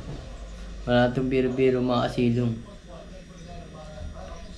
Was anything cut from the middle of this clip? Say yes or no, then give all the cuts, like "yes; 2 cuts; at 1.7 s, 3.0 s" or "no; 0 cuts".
no; 0 cuts